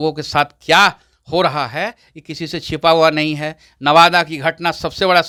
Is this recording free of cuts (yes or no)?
yes